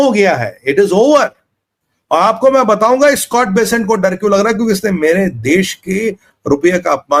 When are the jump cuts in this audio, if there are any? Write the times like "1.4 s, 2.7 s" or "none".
none